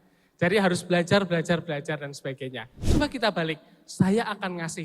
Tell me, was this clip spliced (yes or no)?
yes